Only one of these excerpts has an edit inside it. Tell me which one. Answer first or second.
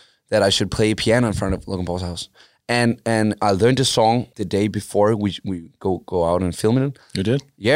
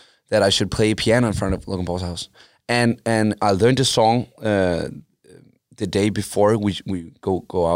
first